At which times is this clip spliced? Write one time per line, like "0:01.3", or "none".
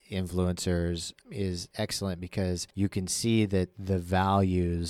0:01.5
0:02.7